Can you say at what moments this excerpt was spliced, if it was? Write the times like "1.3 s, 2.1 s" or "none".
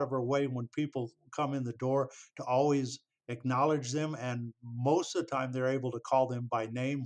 none

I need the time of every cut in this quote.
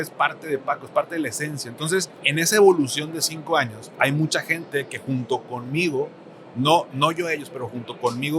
2.2 s, 3.9 s

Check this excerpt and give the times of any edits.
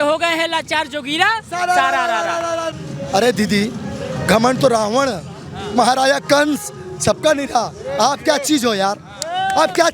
2.7 s

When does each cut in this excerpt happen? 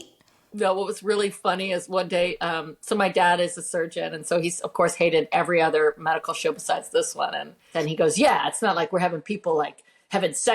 7.7 s

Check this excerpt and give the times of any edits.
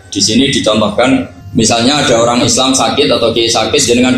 1.4 s

